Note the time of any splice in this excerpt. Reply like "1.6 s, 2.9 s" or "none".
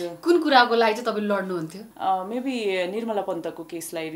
1.8 s